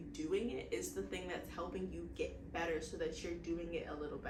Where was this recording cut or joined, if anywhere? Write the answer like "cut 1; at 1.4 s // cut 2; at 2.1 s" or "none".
none